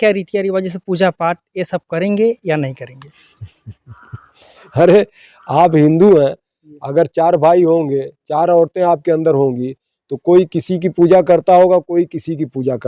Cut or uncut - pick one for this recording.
uncut